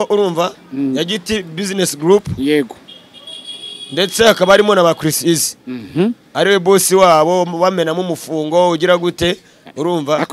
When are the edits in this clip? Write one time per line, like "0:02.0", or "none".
none